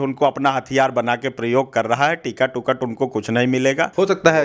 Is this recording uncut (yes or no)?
yes